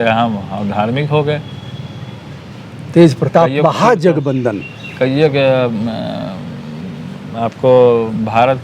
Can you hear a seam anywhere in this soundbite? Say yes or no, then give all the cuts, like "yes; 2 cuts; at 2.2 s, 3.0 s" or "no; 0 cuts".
no; 0 cuts